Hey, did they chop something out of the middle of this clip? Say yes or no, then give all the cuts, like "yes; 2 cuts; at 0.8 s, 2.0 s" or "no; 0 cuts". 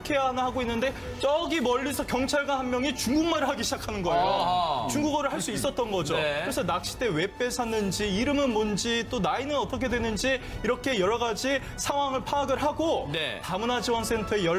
no; 0 cuts